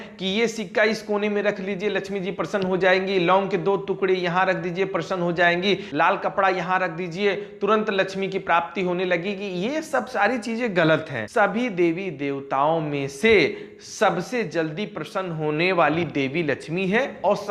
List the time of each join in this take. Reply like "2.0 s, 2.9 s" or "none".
none